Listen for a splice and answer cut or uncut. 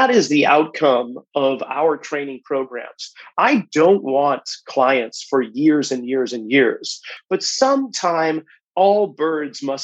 cut